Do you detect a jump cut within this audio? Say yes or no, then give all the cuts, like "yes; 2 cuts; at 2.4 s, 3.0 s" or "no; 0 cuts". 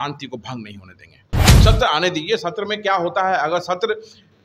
yes; 1 cut; at 1.5 s